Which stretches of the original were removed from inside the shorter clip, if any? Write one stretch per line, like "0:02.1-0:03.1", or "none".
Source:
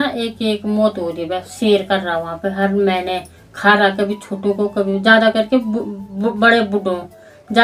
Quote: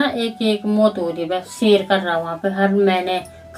none